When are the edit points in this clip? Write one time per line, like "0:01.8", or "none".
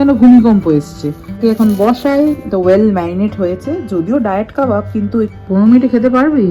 0:01.4
0:05.3